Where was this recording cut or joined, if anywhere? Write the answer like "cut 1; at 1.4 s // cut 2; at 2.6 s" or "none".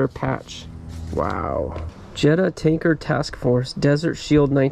cut 1; at 1.8 s